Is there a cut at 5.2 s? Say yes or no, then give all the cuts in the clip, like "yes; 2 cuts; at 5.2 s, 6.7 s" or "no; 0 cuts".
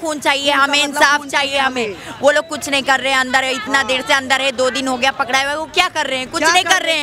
no; 0 cuts